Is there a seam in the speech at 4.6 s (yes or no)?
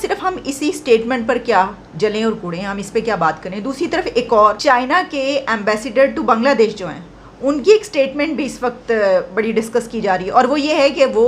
yes